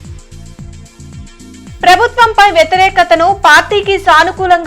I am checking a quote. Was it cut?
yes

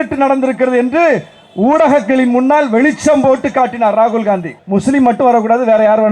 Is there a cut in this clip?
yes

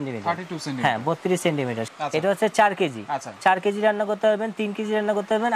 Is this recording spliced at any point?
yes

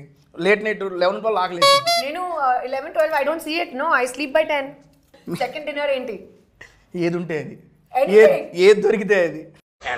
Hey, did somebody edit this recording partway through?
yes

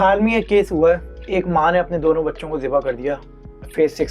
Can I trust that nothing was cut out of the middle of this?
yes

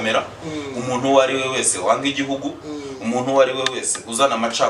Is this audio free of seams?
yes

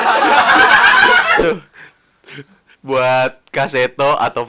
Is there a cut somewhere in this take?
yes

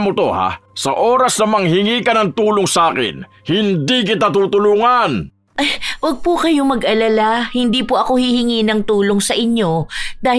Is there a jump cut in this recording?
yes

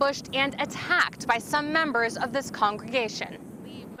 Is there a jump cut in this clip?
no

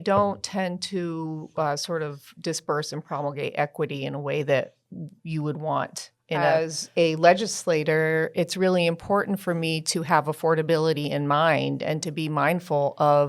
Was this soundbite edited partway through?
yes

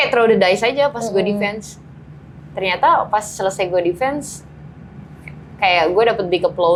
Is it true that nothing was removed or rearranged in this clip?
yes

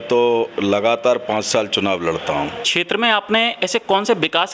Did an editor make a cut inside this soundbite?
yes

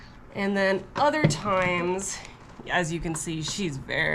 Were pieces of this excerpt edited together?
no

